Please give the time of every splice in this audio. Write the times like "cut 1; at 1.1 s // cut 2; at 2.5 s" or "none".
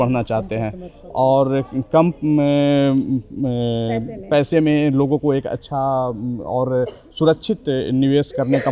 none